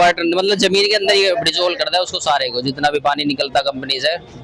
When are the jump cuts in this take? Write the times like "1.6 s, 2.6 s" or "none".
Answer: none